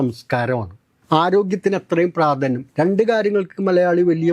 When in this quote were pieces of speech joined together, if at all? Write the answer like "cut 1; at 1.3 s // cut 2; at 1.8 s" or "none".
none